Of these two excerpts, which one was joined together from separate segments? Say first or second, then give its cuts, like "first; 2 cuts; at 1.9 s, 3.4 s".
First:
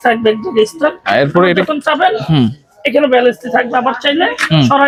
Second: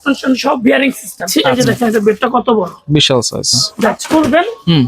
second; 2 cuts; at 1.5 s, 3.9 s